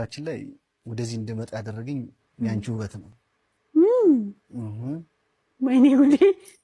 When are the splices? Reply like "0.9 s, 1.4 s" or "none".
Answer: none